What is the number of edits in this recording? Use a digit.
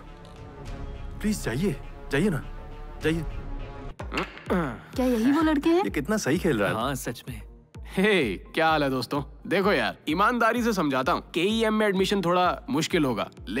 1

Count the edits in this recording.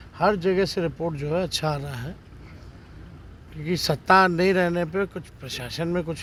0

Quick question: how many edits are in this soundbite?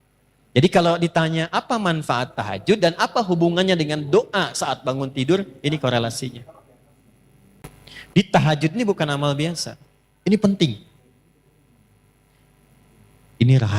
1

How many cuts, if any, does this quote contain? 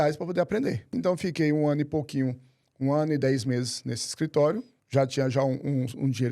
2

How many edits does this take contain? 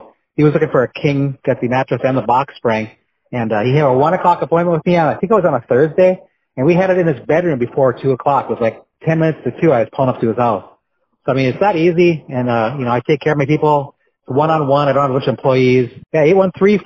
0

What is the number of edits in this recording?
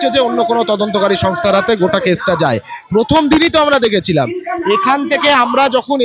0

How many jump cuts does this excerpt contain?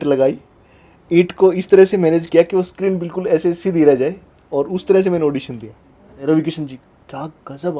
1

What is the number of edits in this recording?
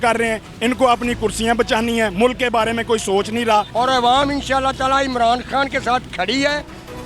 1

